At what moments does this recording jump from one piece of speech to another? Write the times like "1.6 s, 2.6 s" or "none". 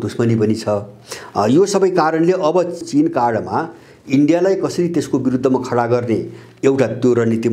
2.9 s

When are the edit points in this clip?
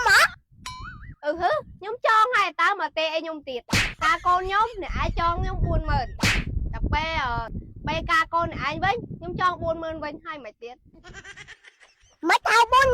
3.9 s

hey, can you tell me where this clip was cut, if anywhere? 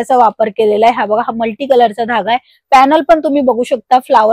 none

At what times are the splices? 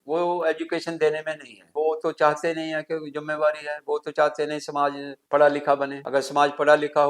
1.7 s, 5.1 s, 6.0 s

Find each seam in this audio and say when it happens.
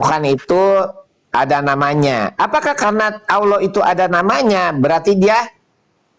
none

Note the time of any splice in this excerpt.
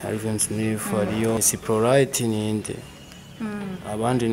1.4 s

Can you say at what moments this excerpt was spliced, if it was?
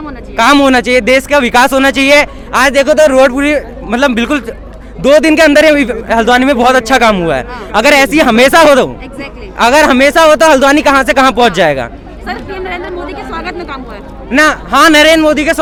none

